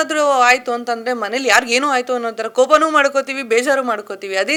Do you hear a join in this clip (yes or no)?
no